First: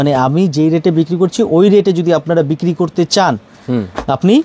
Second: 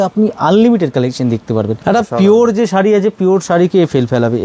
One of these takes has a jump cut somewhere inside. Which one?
second; 1 cut; at 1.7 s

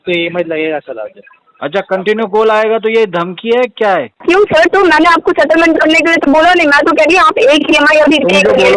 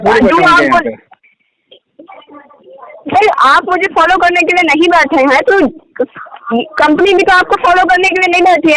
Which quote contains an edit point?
first; 1 cut; at 4.1 s

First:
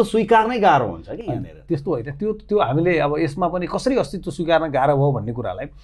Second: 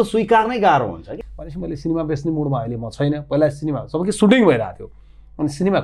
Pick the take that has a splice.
second; 1 cut; at 1.1 s

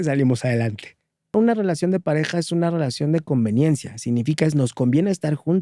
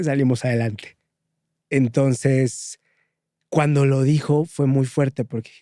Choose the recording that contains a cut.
first; 1 cut; at 1.3 s

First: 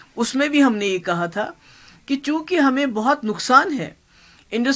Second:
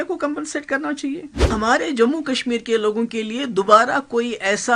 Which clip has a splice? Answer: second; 1 cut; at 1.5 s

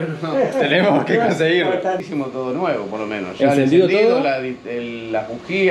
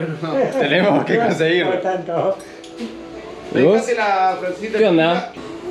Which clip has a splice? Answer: first; 1 cut; at 2.0 s

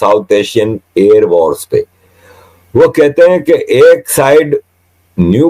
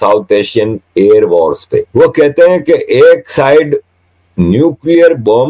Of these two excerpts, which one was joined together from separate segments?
second; 1 cut; at 1.9 s

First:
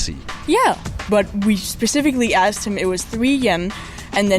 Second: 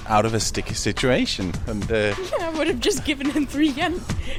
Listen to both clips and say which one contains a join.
first; 1 cut; at 1.0 s

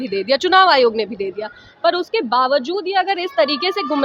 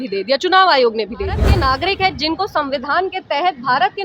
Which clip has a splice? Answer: second; 1 cut; at 1.5 s

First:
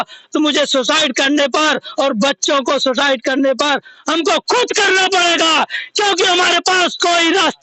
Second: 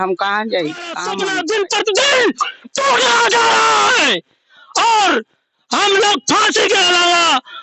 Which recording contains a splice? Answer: second; 1 cut; at 1.1 s

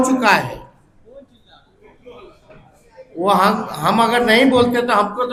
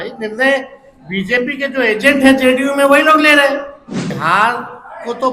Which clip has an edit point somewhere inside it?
second; 1 cut; at 4.2 s

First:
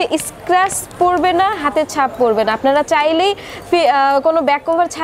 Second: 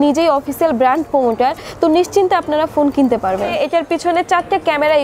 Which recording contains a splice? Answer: second; 1 cut; at 3.5 s

